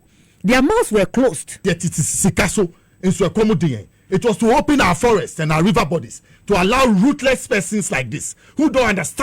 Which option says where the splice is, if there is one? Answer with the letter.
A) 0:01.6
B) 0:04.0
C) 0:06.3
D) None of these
A